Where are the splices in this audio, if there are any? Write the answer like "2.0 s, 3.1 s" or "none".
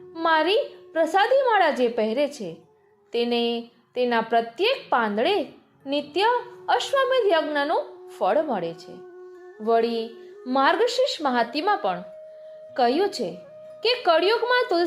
none